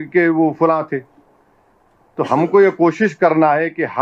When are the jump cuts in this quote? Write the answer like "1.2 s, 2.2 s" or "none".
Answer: none